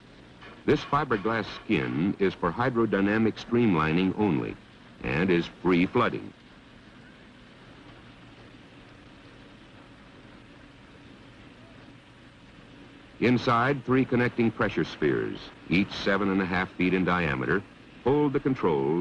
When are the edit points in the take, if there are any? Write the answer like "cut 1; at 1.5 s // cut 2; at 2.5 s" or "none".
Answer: cut 1; at 15.3 s